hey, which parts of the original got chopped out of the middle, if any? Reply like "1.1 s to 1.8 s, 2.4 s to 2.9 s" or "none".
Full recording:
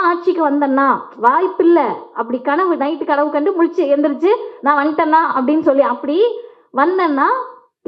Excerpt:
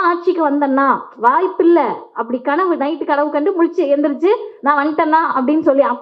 none